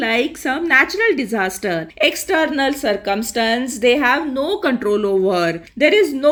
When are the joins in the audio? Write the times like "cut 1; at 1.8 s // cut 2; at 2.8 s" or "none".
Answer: none